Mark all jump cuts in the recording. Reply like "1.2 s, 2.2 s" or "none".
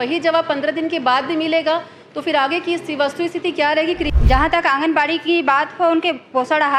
4.2 s